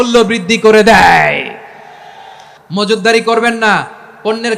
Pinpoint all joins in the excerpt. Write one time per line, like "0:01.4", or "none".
0:02.5